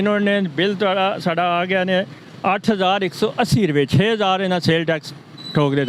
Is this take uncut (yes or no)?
yes